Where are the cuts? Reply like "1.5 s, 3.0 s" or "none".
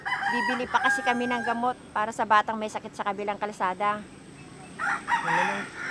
none